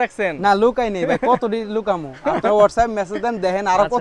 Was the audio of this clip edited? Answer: no; 0 cuts

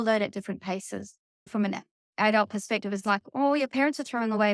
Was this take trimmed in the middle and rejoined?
yes; 1 cut; at 1.5 s

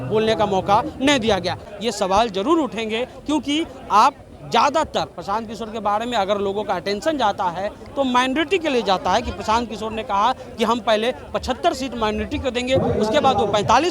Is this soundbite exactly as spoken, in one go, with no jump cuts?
no; 1 cut; at 1.7 s

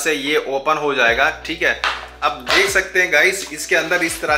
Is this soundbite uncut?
yes; 0 cuts

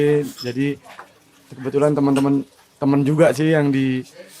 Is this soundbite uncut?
yes; 0 cuts

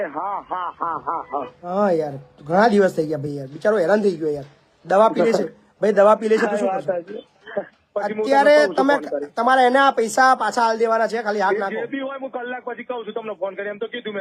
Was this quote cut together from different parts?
yes; 1 cut; at 7.8 s

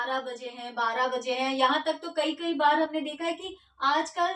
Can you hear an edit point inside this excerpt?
no; 0 cuts

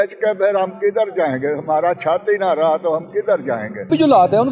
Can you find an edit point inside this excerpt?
no; 0 cuts

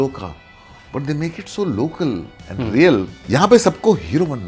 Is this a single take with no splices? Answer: no; 1 cut; at 3.2 s

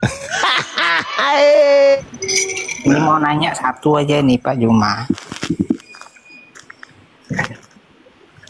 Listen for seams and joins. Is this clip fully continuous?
no; 1 cut; at 2.0 s

